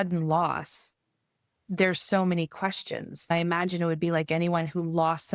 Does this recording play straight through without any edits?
no; 2 cuts; at 1.6 s, 3.3 s

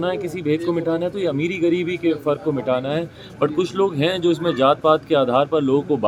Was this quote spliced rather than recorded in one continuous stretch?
no; 0 cuts

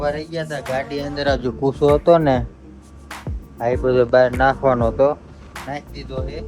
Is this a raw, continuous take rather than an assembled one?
yes; 0 cuts

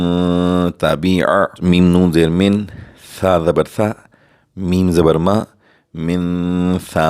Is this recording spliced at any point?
yes; 1 cut; at 1.6 s

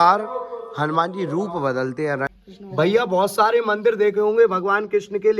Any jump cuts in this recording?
yes; 1 cut; at 2.3 s

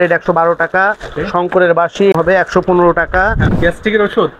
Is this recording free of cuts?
no; 2 cuts; at 2.1 s, 3.5 s

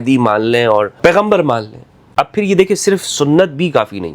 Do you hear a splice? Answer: yes; 2 cuts; at 1.0 s, 2.1 s

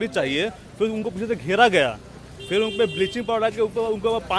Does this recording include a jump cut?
no; 0 cuts

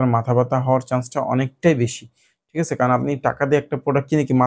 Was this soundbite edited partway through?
no; 0 cuts

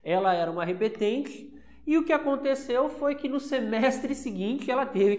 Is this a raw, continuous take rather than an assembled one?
yes; 0 cuts

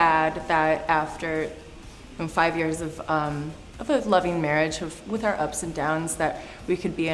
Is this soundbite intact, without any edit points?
yes; 0 cuts

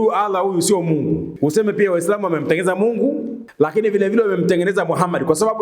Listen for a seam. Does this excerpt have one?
yes; 2 cuts; at 1.3 s, 3.4 s

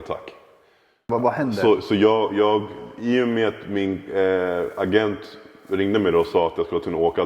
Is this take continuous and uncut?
no; 1 cut; at 1.0 s

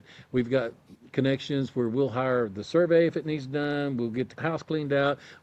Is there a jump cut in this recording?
yes; 1 cut; at 4.3 s

